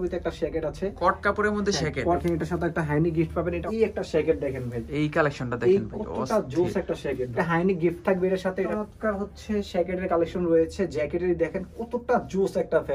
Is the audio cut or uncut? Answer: cut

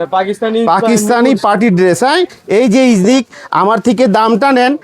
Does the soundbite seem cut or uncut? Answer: cut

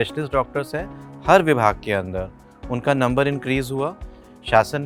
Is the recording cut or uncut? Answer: uncut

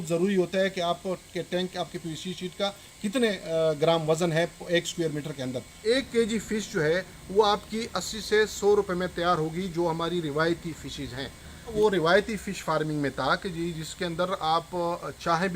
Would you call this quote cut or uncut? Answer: cut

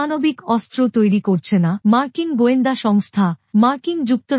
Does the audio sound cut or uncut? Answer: uncut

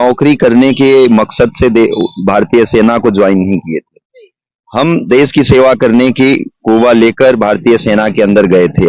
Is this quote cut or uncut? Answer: uncut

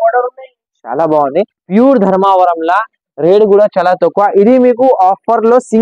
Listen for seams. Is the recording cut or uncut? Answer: cut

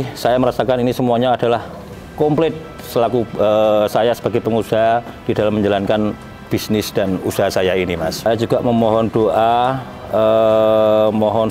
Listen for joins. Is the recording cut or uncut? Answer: cut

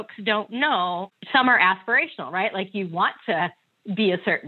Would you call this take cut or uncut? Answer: cut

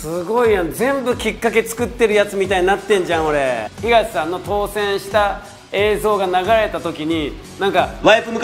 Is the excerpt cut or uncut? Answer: cut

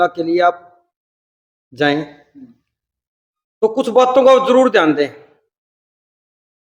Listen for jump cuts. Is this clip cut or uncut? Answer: uncut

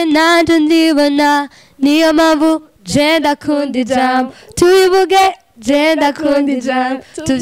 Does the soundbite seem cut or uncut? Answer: uncut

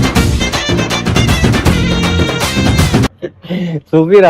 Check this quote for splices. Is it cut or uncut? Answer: uncut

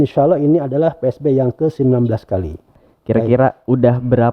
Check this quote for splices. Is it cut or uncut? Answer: cut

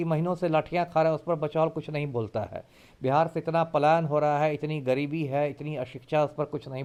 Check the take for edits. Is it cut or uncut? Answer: uncut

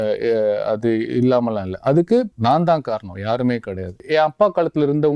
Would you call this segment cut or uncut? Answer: cut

